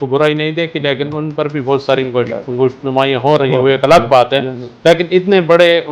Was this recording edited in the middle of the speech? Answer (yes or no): no